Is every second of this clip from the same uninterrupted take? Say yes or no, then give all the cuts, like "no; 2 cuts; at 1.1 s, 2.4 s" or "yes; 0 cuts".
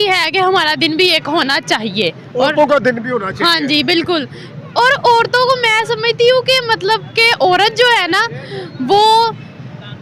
yes; 0 cuts